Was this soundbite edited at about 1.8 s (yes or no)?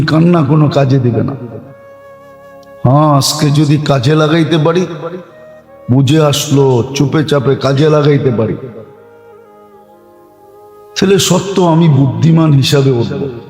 no